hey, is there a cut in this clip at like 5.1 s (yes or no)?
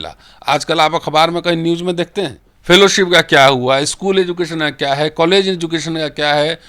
no